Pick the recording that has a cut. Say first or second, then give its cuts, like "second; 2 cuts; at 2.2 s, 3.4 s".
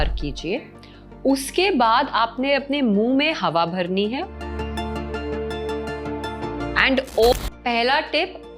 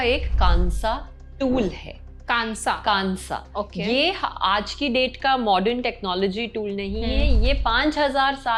first; 1 cut; at 7.3 s